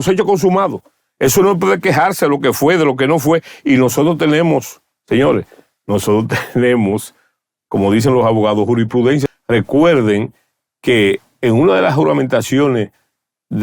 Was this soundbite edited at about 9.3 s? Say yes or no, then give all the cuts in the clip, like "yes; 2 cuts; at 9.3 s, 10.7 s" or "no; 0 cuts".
yes; 1 cut; at 9.3 s